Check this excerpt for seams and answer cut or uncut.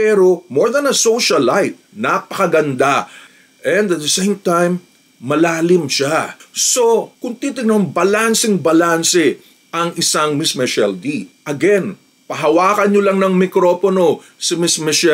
cut